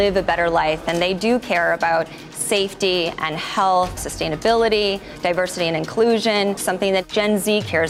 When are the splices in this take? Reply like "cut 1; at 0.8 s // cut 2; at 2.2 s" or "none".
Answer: cut 1; at 4.1 s // cut 2; at 6.9 s